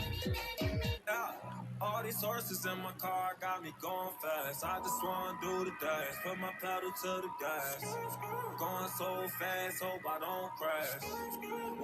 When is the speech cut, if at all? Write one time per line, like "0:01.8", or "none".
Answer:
0:01.0